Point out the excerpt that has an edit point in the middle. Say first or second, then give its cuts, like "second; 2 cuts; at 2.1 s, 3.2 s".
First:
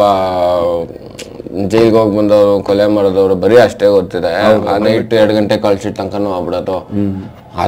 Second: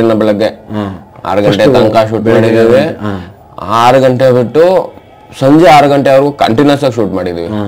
first; 1 cut; at 4.7 s